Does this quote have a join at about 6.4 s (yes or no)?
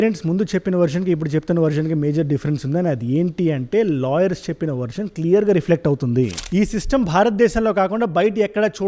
yes